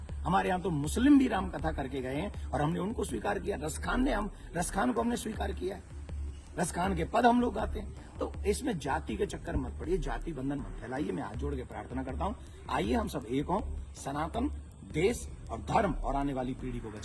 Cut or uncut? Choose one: uncut